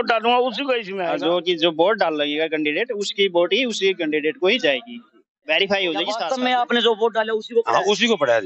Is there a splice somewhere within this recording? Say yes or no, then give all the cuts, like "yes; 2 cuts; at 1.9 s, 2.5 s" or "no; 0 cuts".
yes; 2 cuts; at 0.9 s, 6.2 s